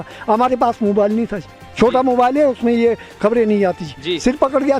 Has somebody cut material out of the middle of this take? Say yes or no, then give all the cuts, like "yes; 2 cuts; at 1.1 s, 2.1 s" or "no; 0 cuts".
no; 0 cuts